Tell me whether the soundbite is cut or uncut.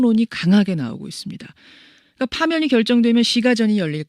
cut